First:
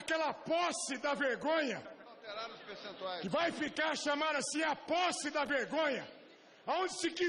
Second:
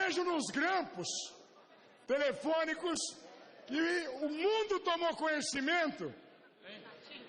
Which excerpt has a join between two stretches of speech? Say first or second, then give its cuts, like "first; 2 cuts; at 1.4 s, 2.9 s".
second; 1 cut; at 1.7 s